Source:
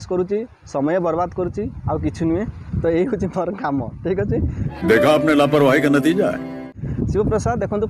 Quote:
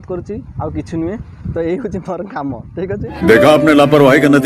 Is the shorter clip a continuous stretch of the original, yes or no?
no